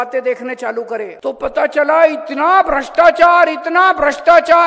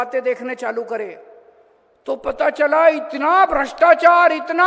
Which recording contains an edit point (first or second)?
first